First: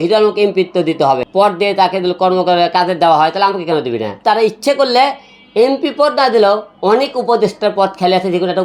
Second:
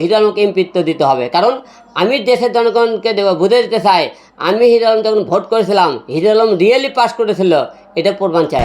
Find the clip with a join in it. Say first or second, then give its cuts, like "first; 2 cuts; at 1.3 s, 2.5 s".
first; 2 cuts; at 1.2 s, 4.1 s